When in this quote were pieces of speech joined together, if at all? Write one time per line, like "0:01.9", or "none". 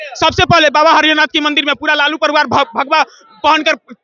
none